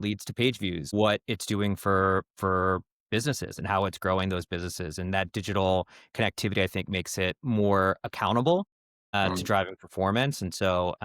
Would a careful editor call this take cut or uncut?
cut